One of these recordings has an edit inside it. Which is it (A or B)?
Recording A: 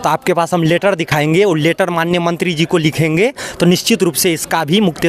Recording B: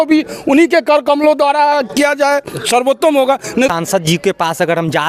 B